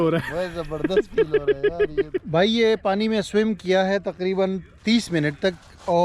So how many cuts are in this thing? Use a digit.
1